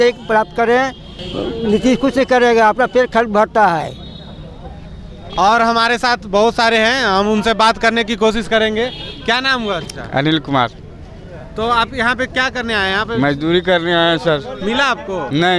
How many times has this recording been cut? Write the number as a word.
zero